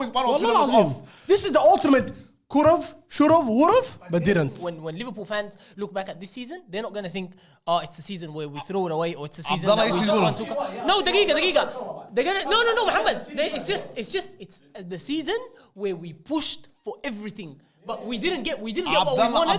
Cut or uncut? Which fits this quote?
cut